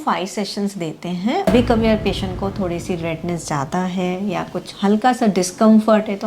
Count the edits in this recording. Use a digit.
1